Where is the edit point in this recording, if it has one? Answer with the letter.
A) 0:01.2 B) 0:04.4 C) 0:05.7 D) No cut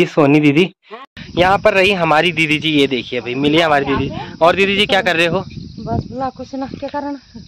A